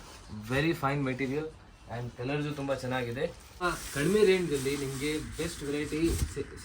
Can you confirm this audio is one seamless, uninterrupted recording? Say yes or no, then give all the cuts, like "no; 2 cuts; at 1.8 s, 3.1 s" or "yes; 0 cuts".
no; 1 cut; at 3.6 s